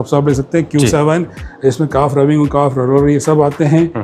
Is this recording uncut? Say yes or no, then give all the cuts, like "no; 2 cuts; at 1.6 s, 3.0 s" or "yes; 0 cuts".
yes; 0 cuts